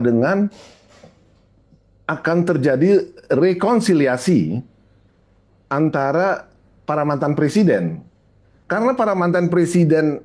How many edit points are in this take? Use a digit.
0